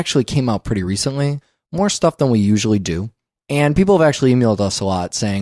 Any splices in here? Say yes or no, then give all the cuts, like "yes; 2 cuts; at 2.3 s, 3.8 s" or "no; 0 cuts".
no; 0 cuts